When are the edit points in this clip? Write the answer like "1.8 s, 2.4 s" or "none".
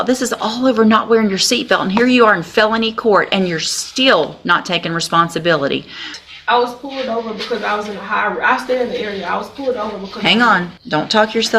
6.2 s, 10.7 s